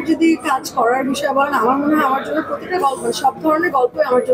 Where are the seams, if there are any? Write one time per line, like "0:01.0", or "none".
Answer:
none